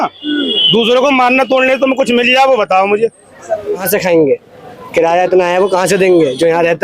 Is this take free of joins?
no; 1 cut; at 3.8 s

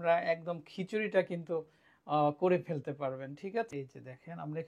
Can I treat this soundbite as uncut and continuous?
no; 1 cut; at 3.7 s

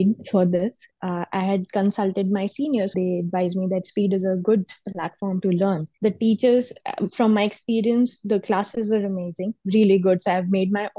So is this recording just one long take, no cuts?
no; 2 cuts; at 2.9 s, 5.9 s

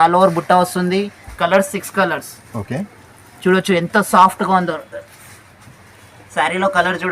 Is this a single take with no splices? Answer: yes; 0 cuts

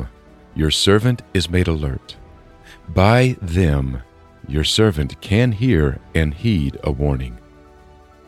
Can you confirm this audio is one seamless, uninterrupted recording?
no; 1 cut; at 7.4 s

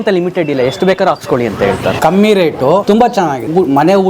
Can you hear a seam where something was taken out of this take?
yes; 2 cuts; at 1.9 s, 3.1 s

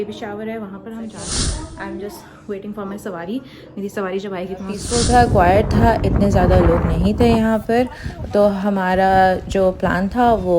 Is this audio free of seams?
no; 2 cuts; at 1.2 s, 4.8 s

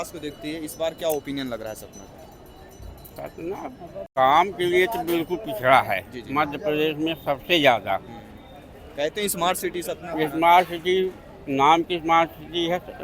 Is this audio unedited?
no; 1 cut; at 4.0 s

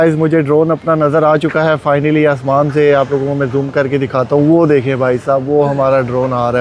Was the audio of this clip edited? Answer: no; 0 cuts

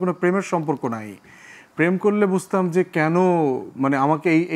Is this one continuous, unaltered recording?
yes; 0 cuts

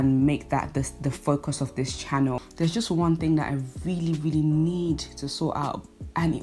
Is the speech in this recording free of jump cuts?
no; 1 cut; at 2.4 s

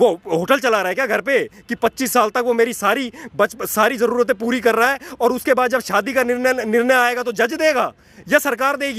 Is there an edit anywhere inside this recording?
no; 0 cuts

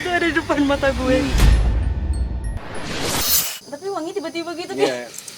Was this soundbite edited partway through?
yes; 2 cuts; at 1.3 s, 3.5 s

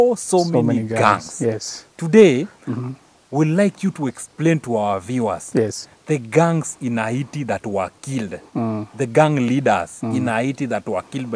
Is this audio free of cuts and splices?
yes; 0 cuts

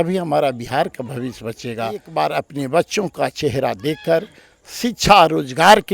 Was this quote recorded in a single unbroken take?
no; 1 cut; at 2.1 s

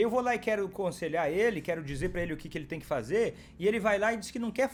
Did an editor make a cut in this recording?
no; 0 cuts

